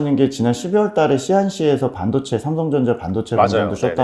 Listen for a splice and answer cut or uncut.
uncut